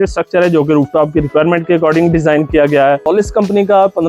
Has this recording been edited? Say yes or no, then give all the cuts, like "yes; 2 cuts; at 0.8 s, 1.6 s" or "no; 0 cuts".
yes; 1 cut; at 3.0 s